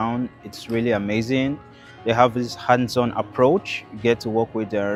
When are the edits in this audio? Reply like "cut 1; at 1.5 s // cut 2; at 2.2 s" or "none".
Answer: none